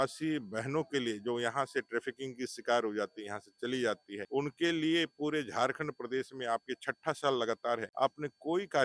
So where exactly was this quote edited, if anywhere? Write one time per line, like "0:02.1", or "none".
0:04.1
0:07.9